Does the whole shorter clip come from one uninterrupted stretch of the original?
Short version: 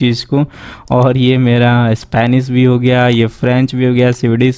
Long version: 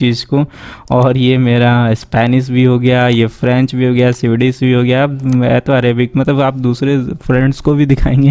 yes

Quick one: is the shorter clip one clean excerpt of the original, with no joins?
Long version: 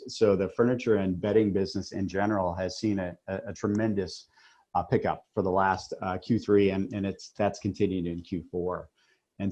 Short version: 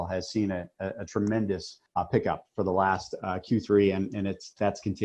no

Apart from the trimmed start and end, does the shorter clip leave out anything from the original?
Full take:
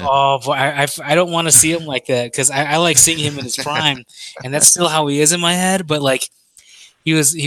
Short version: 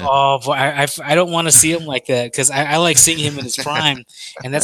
no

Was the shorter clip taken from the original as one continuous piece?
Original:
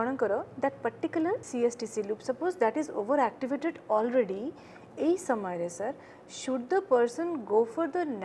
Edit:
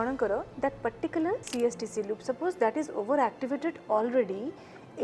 yes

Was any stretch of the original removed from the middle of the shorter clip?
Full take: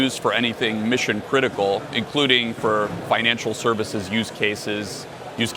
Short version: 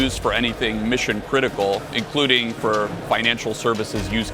no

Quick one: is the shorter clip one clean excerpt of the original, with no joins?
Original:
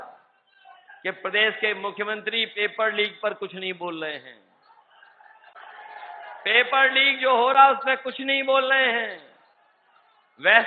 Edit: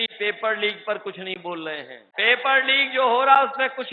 no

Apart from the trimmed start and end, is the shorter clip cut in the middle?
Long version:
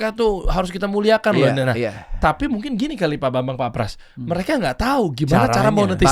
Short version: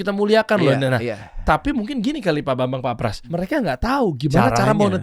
yes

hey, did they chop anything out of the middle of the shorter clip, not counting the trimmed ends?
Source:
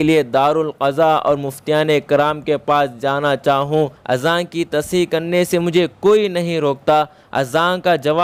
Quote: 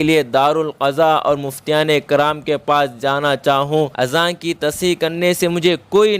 yes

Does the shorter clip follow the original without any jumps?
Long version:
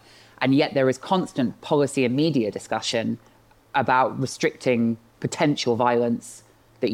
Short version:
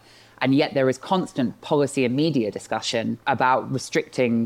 no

